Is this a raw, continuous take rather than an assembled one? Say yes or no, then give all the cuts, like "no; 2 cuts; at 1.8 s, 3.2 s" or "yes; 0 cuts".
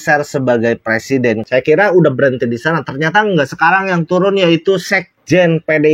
no; 1 cut; at 1.4 s